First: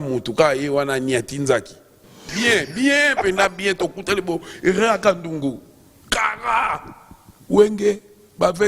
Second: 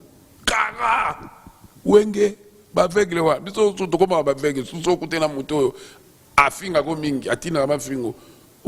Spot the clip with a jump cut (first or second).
first